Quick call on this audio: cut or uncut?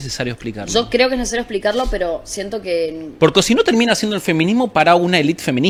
uncut